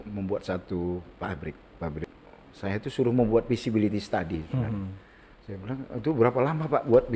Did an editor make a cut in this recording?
yes; 1 cut; at 2.0 s

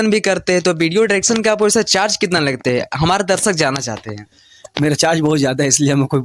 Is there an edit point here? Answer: no; 0 cuts

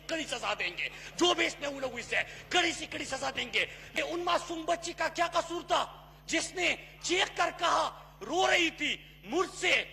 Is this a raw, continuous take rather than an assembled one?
no; 1 cut; at 4.0 s

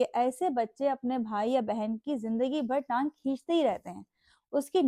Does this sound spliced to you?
no; 0 cuts

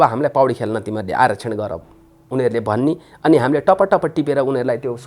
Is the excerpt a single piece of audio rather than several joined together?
yes; 0 cuts

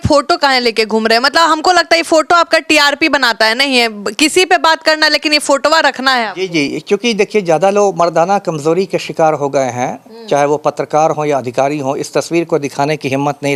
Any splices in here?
no; 0 cuts

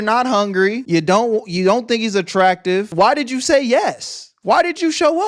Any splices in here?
no; 0 cuts

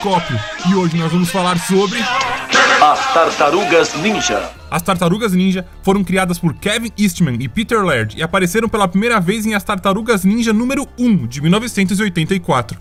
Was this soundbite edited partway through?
no; 0 cuts

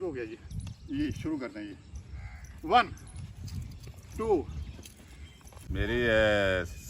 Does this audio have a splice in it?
yes; 1 cut; at 5.5 s

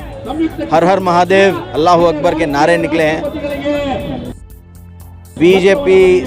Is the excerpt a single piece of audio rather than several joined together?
yes; 0 cuts

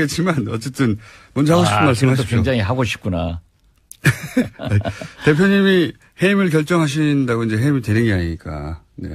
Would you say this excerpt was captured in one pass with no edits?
yes; 0 cuts

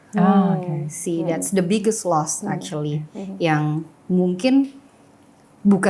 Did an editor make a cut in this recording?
no; 0 cuts

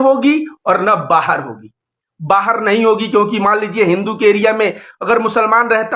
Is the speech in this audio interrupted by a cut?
no; 0 cuts

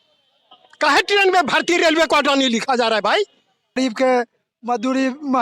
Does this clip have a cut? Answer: yes; 1 cut; at 3.8 s

